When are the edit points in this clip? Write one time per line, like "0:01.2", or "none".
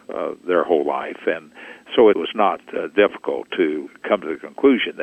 0:02.3
0:03.9